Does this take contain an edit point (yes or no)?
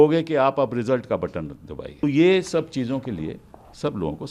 yes